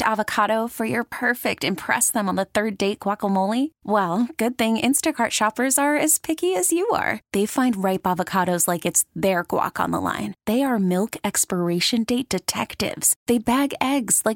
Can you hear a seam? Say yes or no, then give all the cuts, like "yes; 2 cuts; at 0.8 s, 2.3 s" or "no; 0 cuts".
no; 0 cuts